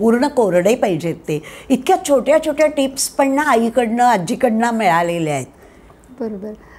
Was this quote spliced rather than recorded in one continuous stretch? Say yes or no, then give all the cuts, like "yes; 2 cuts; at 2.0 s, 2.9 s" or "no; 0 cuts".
no; 0 cuts